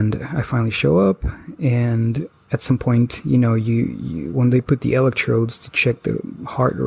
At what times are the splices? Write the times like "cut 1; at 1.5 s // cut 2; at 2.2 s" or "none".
none